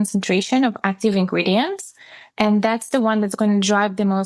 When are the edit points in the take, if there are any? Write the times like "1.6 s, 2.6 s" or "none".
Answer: none